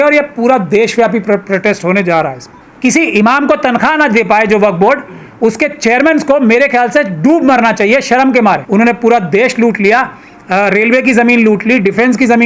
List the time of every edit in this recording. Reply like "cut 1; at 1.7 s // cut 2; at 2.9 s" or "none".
cut 1; at 2.5 s // cut 2; at 8.6 s